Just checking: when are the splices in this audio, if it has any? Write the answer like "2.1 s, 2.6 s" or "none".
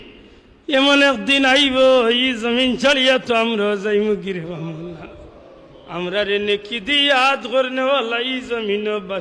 none